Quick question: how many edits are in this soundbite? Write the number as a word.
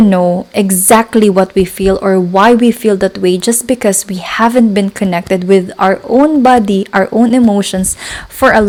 zero